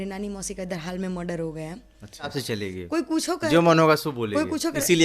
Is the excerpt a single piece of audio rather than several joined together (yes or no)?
no